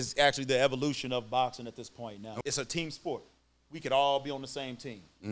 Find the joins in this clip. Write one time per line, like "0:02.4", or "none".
0:02.3